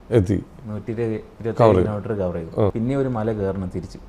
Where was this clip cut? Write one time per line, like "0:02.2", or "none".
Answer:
0:02.7

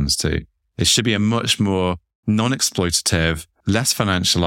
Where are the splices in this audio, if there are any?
0:02.1
0:03.5

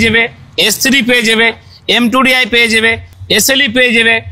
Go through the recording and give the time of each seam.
none

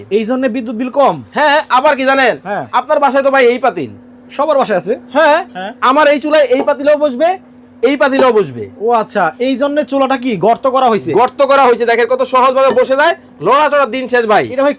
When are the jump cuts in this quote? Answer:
none

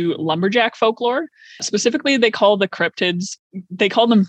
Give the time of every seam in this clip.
0:01.6

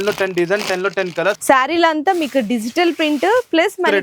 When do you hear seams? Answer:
0:01.4

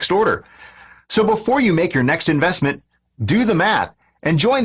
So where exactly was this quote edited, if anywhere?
none

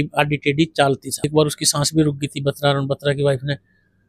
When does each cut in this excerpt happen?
0:01.3

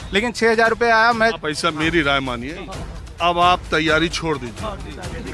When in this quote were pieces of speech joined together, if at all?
0:01.3

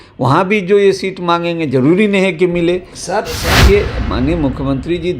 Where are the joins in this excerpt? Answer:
0:03.6

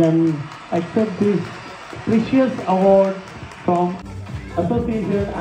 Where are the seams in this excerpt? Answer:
0:04.0

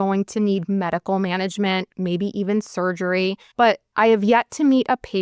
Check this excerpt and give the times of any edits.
0:01.9
0:03.6

